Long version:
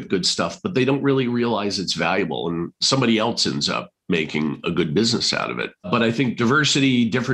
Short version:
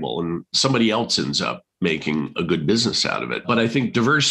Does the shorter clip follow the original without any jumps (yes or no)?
no